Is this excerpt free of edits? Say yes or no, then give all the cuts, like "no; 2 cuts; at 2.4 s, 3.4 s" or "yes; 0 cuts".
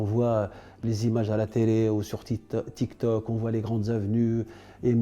yes; 0 cuts